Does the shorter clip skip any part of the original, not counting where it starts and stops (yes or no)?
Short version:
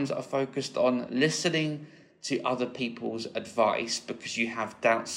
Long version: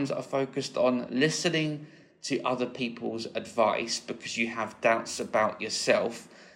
no